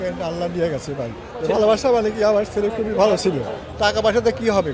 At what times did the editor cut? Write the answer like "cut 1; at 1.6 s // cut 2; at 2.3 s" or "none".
cut 1; at 1.3 s // cut 2; at 3.6 s